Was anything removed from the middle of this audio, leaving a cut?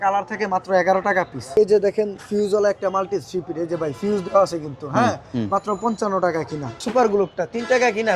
yes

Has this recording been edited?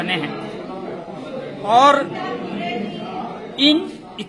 no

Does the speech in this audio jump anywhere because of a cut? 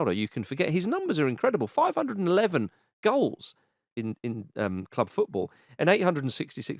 yes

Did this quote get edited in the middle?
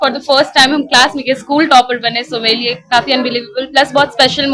no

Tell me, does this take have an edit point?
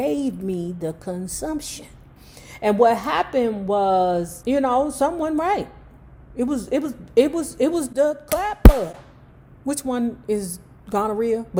no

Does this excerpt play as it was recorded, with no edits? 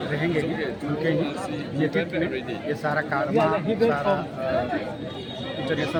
yes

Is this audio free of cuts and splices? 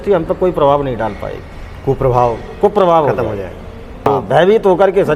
no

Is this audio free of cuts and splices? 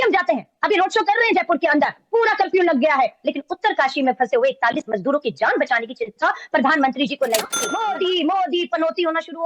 no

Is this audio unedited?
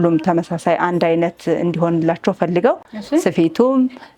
yes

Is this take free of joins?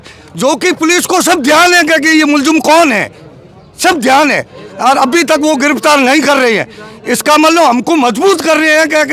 yes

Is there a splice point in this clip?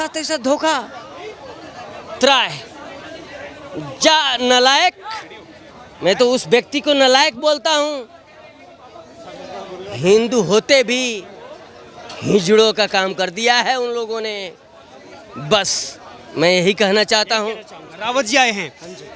no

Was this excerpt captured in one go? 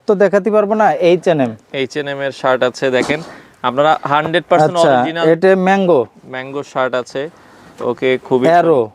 yes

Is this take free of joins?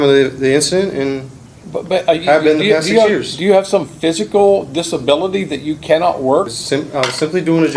no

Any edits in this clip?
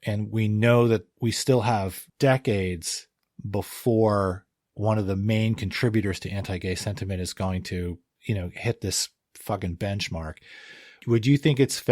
yes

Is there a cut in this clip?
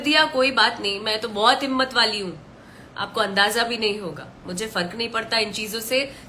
no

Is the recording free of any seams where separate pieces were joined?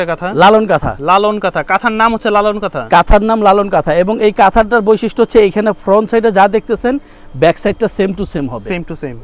yes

